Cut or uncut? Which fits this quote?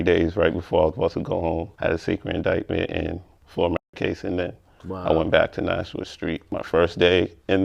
cut